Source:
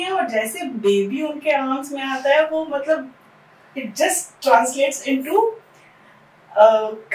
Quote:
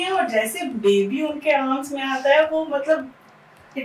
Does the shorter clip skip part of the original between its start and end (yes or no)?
no